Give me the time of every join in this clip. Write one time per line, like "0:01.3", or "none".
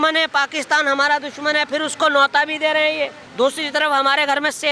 0:03.2